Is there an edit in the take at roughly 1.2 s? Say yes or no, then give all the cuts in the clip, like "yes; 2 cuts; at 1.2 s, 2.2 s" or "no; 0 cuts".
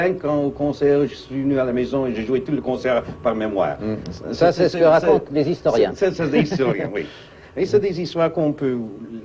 no; 1 cut; at 6.9 s